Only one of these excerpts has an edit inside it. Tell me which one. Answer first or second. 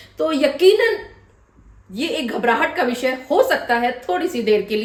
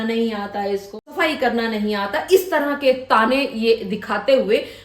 second